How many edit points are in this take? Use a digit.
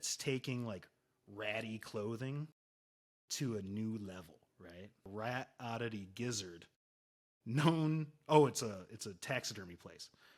1